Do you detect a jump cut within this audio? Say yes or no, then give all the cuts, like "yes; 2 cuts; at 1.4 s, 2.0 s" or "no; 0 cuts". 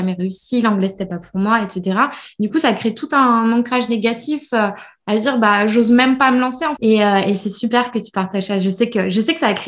yes; 1 cut; at 6.7 s